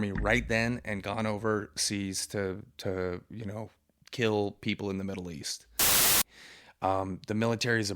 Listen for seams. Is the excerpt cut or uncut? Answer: cut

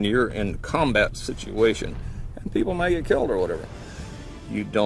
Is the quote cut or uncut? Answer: uncut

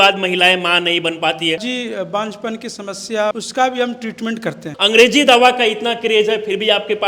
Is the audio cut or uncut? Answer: cut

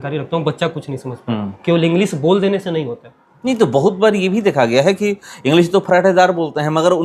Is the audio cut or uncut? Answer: uncut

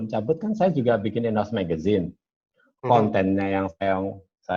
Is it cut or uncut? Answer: uncut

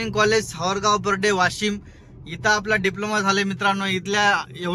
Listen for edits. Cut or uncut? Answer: uncut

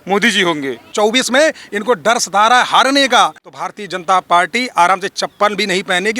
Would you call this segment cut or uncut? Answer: cut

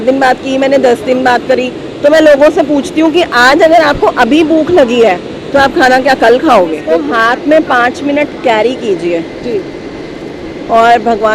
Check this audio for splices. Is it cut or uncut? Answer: cut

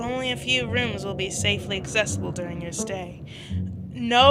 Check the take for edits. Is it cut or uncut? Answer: uncut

